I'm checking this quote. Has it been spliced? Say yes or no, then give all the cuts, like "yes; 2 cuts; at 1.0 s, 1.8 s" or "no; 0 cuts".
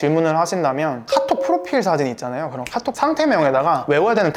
yes; 1 cut; at 1.0 s